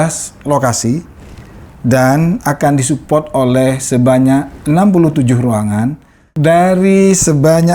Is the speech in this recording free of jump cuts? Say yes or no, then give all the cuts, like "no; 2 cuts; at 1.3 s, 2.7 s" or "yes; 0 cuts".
no; 1 cut; at 6.3 s